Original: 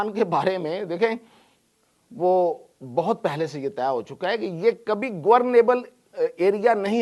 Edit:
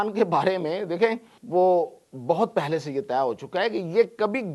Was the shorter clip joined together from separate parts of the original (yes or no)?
yes